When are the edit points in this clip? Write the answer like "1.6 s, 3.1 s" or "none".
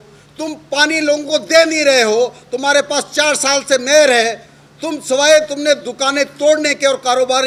none

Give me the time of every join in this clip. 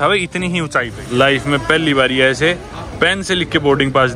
1.0 s

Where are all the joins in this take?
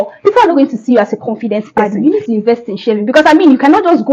2.1 s

